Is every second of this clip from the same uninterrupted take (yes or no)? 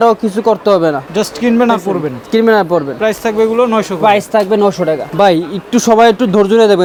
yes